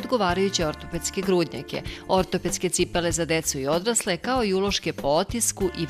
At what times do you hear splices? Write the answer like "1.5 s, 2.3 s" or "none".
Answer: none